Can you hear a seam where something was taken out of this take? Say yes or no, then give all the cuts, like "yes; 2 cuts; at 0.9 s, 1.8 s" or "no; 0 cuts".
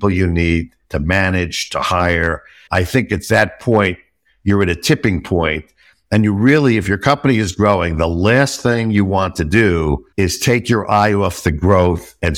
yes; 1 cut; at 2.5 s